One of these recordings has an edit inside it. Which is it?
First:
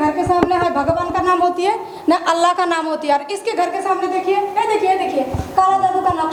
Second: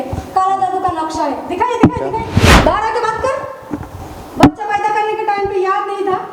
second; 1 cut; at 2.6 s

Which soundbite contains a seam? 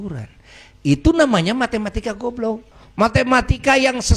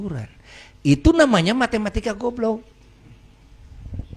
first; 1 cut; at 2.8 s

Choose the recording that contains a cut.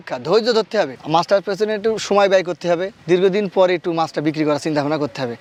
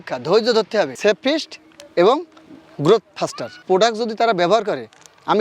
second; 2 cuts; at 0.9 s, 3.6 s

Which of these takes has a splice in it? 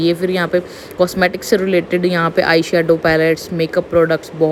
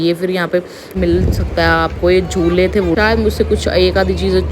second; 2 cuts; at 0.9 s, 3.0 s

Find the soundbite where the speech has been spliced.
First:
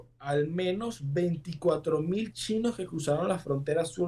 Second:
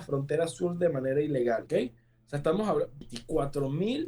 second; 2 cuts; at 1.6 s, 3.0 s

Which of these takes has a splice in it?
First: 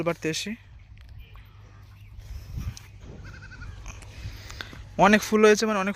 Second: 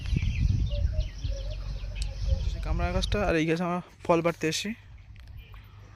second; 1 cut; at 2.8 s

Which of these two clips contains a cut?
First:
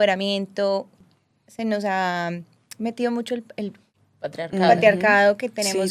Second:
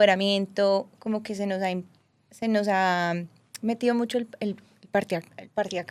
first; 2 cuts; at 1.0 s, 3.9 s

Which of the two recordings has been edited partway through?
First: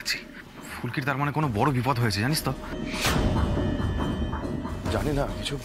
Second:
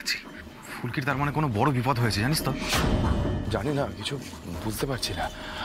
second; 2 cuts; at 2.5 s, 3.5 s

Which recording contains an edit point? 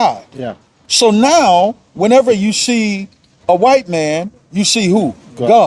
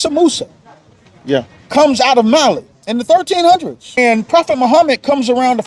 second; 2 cuts; at 2.8 s, 4.0 s

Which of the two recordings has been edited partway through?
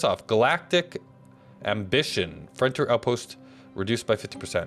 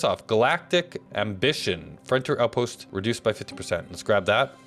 second; 2 cuts; at 1.0 s, 2.8 s

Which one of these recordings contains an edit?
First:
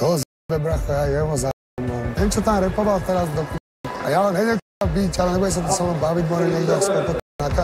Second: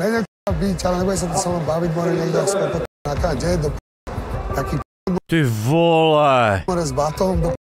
first; 1 cut; at 2.1 s

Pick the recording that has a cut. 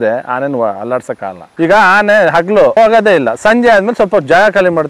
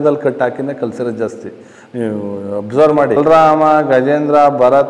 first; 2 cuts; at 1.4 s, 2.8 s

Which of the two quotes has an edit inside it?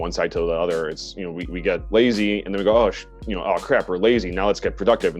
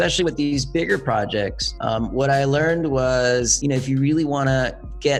first; 1 cut; at 1.8 s

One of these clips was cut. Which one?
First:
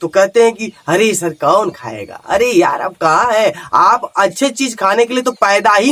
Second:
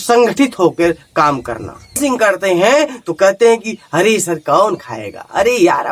second; 1 cut; at 2.0 s

